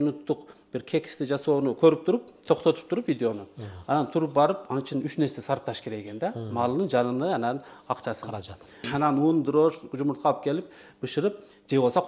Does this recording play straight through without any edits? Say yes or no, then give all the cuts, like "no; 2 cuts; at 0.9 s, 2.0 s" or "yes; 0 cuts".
no; 1 cut; at 8.9 s